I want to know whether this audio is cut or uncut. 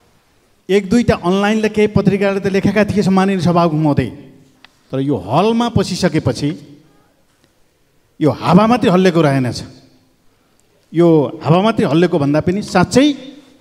uncut